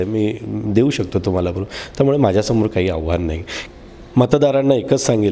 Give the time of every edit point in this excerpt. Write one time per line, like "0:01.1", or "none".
0:03.5